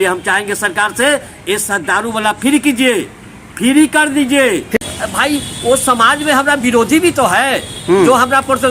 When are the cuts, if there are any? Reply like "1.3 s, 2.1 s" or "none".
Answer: 4.8 s